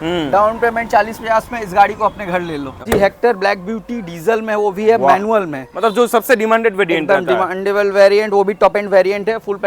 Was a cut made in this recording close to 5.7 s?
no; 1 cut; at 2.9 s

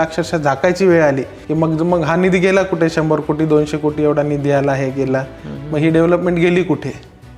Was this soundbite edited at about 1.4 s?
no; 0 cuts

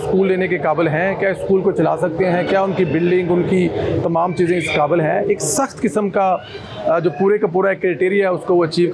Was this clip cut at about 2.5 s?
no; 0 cuts

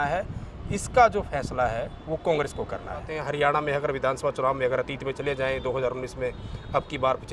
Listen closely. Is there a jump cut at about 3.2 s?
yes; 1 cut; at 3.2 s

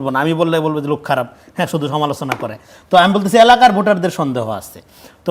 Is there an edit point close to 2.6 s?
no; 0 cuts

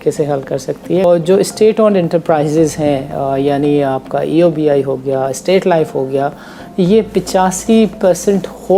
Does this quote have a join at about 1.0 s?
yes; 1 cut; at 1.0 s

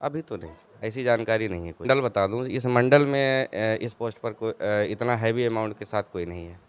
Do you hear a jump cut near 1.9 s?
yes; 1 cut; at 1.9 s

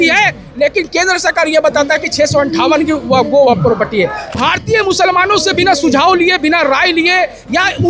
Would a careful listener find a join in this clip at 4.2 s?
yes; 1 cut; at 4.2 s

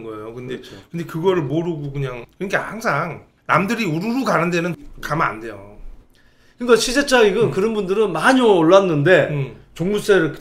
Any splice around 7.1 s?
no; 3 cuts; at 2.2 s, 3.3 s, 4.7 s

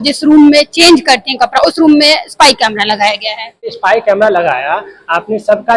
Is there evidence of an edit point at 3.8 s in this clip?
yes; 1 cut; at 3.8 s

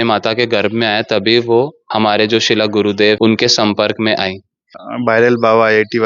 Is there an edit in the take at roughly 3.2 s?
yes; 3 cuts; at 1.8 s, 3.2 s, 4.8 s

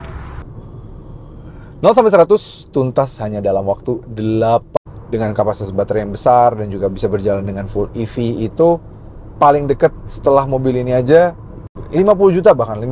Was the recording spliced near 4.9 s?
yes; 1 cut; at 4.9 s

